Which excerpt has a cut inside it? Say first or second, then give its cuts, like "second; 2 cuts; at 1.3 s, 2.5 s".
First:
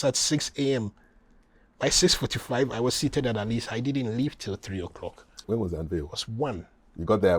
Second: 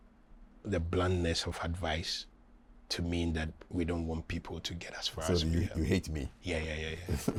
first; 1 cut; at 5.4 s